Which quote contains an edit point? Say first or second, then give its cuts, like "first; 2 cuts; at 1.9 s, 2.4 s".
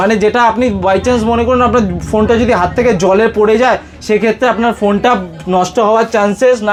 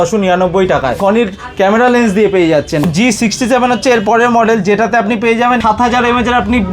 second; 3 cuts; at 1.0 s, 2.9 s, 5.6 s